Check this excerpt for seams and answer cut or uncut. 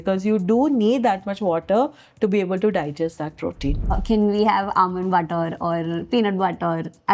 cut